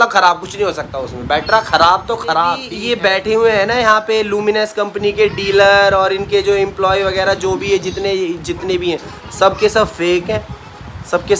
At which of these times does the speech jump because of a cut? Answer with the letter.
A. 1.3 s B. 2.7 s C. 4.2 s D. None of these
B